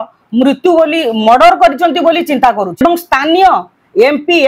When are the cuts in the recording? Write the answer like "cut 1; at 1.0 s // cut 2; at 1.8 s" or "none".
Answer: cut 1; at 2.8 s